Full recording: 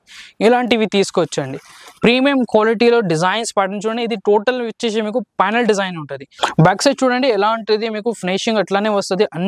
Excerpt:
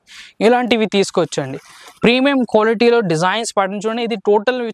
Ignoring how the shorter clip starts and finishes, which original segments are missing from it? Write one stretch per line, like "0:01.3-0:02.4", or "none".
none